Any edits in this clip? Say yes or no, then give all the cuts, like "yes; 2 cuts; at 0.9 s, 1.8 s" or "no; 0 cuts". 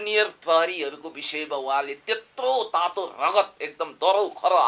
no; 0 cuts